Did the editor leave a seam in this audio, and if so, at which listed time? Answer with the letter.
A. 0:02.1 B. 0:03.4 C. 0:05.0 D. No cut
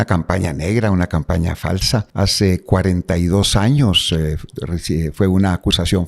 A